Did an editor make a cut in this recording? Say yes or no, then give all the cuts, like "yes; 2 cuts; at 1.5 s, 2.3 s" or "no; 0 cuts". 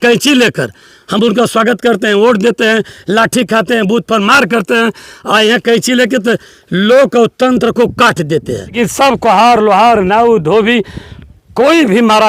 yes; 1 cut; at 8.7 s